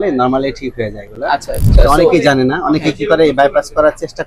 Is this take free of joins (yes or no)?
no